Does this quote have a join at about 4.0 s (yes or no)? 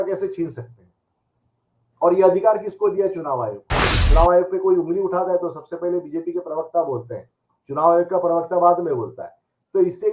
yes